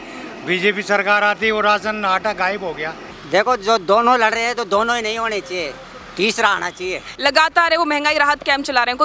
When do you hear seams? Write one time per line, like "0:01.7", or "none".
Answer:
0:03.1
0:07.1